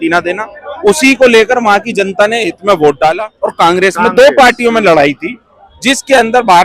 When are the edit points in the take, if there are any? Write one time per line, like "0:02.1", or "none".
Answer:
0:03.3